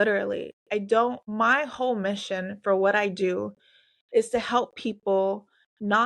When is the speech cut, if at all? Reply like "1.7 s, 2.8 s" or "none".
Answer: 1.2 s